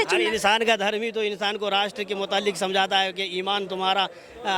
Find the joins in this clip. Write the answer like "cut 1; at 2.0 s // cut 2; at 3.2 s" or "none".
none